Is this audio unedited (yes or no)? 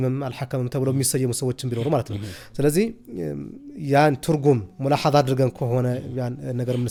yes